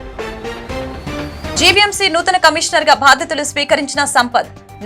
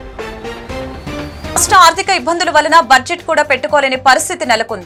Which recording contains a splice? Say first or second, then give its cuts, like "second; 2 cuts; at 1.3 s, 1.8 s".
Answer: first; 1 cut; at 1.5 s